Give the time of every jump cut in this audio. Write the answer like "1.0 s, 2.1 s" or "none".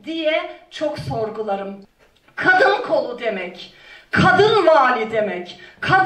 1.8 s